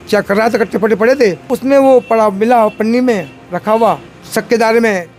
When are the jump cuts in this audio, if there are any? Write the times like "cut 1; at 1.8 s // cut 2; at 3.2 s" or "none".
cut 1; at 1.5 s // cut 2; at 4.1 s